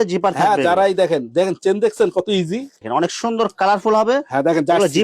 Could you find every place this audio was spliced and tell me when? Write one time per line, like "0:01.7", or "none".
0:02.7

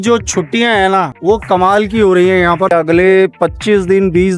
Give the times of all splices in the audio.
0:01.1
0:02.7

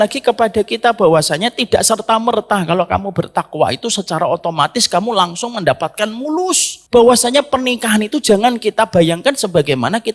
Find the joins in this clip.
0:06.7

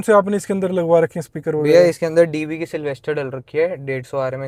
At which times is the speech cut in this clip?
none

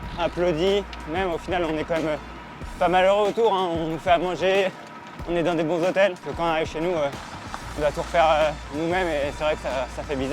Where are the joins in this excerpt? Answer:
0:01.0
0:06.2

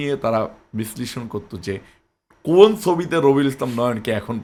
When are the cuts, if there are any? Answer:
none

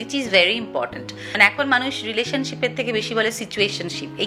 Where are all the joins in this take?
0:01.3

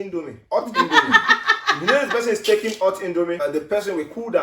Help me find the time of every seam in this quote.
0:03.4

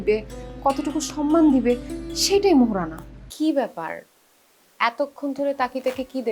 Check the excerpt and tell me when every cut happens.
0:03.3

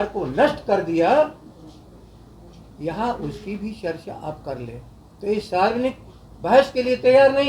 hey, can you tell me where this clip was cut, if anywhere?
none

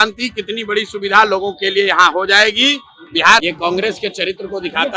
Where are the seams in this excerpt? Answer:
0:03.4

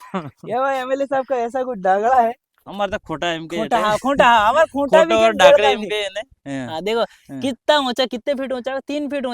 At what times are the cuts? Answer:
0:02.5

